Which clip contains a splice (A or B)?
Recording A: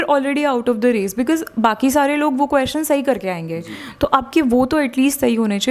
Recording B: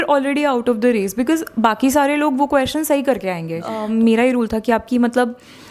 B